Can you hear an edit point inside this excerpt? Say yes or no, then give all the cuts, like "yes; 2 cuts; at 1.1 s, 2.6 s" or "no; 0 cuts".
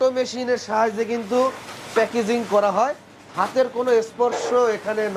no; 0 cuts